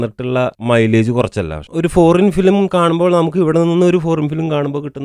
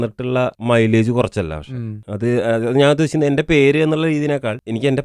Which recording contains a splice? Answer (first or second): first